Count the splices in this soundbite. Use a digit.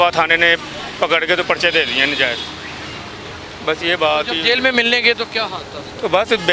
0